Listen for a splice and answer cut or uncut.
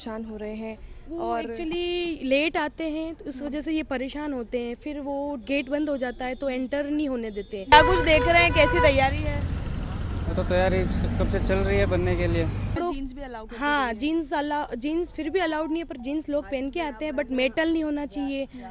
cut